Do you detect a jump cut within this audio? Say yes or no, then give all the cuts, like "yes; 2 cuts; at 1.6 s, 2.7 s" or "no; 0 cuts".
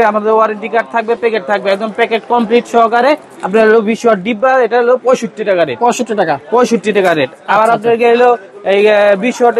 no; 0 cuts